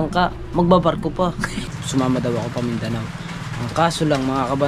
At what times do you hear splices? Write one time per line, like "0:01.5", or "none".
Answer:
0:01.7